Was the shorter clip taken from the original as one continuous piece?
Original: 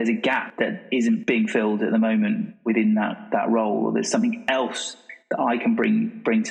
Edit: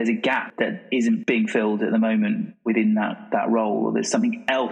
yes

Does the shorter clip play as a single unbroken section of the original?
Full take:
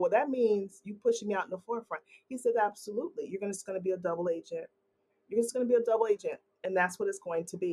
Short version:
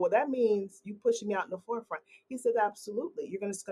yes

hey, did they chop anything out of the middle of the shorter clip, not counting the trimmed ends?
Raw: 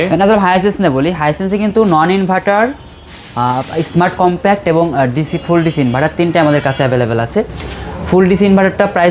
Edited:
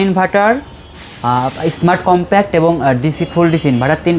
no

